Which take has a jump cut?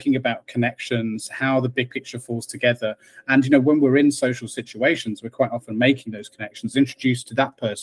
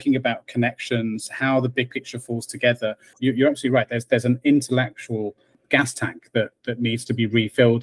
second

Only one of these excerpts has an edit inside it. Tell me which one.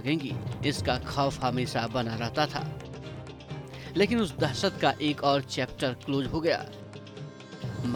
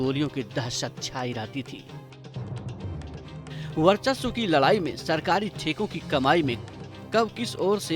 second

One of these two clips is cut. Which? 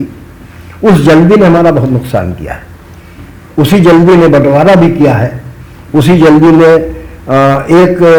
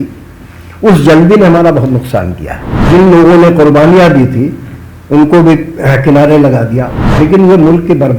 second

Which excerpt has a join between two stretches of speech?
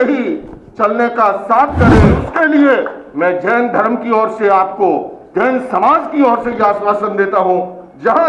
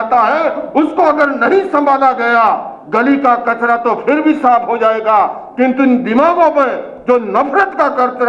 first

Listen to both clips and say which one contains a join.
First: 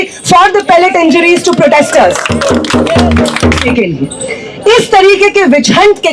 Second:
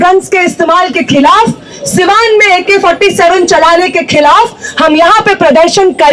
first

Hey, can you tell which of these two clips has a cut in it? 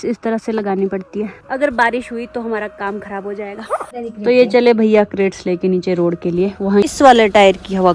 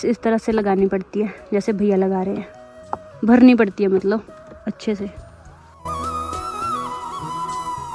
first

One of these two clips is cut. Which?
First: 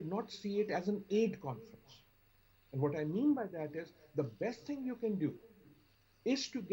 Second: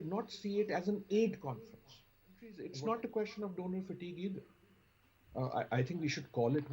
second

